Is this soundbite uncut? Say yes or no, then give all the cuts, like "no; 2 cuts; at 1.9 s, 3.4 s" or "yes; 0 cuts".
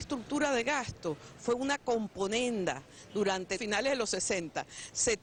yes; 0 cuts